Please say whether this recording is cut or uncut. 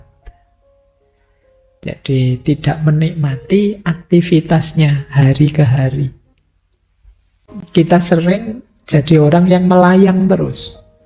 cut